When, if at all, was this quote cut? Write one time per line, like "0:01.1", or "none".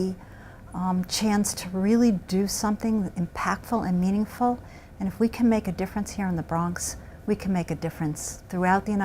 0:07.8